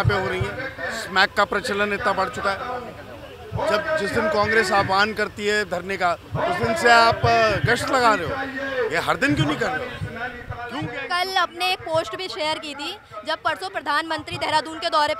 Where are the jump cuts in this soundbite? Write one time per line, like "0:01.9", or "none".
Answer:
none